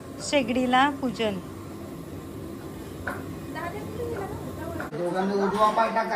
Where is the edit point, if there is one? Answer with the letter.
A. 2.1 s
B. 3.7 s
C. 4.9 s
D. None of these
C